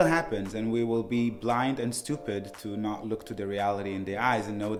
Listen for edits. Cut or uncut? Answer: uncut